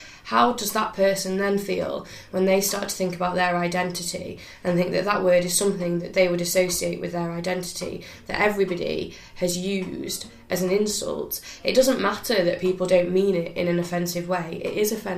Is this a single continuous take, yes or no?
yes